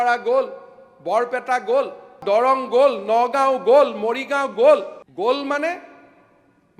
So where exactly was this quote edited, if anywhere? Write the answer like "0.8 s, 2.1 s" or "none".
2.2 s, 5.0 s